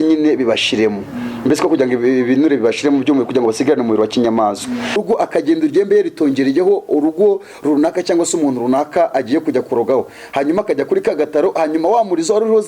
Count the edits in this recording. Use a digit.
1